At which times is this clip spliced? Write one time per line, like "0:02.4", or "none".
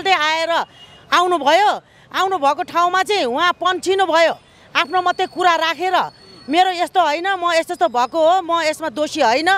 none